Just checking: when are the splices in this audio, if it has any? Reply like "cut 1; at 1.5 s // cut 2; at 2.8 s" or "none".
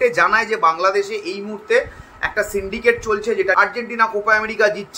cut 1; at 3.5 s